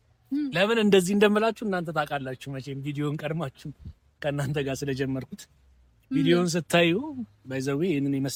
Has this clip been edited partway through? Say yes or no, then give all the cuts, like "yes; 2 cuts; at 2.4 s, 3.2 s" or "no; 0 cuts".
no; 0 cuts